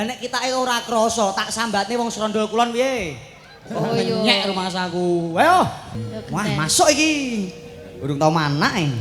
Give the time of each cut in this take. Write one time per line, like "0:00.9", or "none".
0:06.0